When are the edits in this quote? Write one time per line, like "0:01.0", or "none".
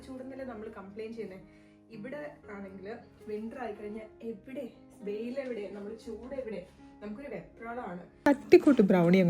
0:08.3